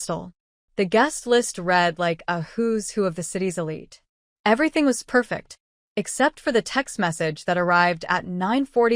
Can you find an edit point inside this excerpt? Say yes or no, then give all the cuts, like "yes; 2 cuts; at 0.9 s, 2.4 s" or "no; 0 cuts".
no; 0 cuts